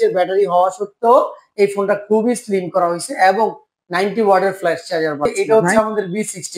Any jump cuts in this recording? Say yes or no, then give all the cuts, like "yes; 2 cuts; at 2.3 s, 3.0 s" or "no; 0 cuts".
yes; 1 cut; at 5.3 s